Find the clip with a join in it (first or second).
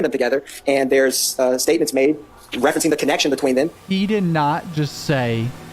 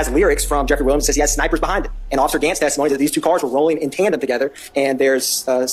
first